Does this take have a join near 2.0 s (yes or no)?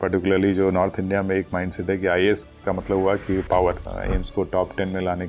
no